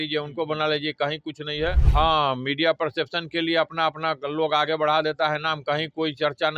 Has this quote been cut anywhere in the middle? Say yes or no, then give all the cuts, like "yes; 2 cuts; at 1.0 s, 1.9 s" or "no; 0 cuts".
yes; 1 cut; at 1.8 s